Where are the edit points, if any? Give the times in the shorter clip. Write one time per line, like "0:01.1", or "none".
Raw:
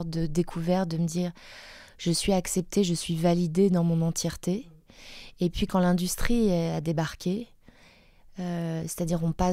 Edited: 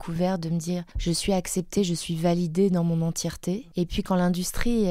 0:00.9
0:03.7